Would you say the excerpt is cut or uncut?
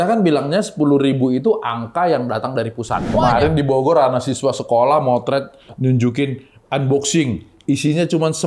cut